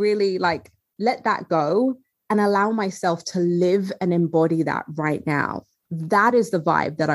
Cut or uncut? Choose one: uncut